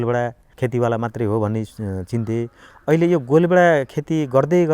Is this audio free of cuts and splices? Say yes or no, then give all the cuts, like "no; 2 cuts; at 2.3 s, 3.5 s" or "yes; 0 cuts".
yes; 0 cuts